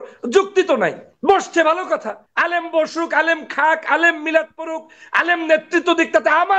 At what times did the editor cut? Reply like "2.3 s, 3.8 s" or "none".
1.1 s, 2.2 s